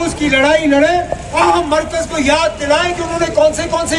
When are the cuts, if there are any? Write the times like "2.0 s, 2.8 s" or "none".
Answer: 1.4 s